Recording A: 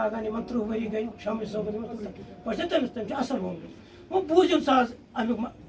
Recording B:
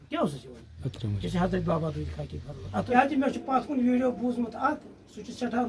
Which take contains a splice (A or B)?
B